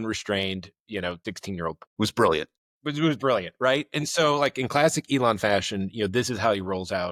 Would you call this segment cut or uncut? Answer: uncut